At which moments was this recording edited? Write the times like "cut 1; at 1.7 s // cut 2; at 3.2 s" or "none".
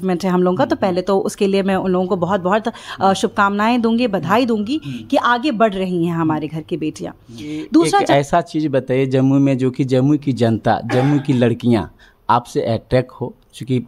cut 1; at 8.1 s